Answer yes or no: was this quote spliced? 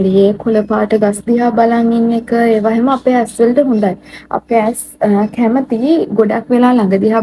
no